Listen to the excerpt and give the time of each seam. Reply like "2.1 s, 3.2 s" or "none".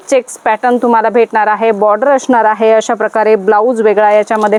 none

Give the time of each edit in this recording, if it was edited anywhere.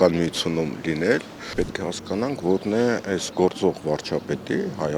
1.5 s

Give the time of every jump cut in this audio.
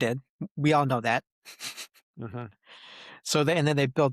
none

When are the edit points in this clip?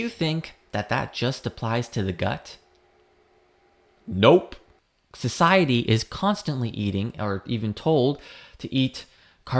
4.7 s

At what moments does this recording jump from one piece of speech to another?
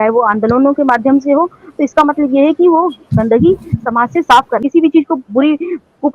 4.6 s

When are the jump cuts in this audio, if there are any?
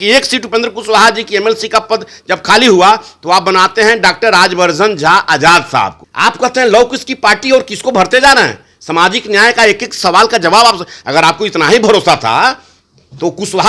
6.0 s

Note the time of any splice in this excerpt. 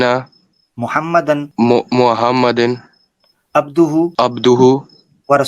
1.5 s, 4.1 s

